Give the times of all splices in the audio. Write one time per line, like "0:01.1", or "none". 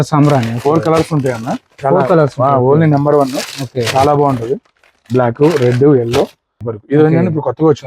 0:06.7